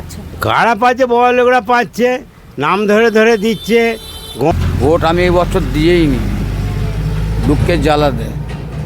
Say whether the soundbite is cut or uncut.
cut